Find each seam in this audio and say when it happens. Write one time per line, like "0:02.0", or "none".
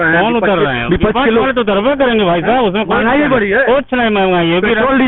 none